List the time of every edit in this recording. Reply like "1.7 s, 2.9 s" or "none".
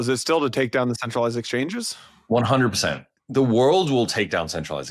3.1 s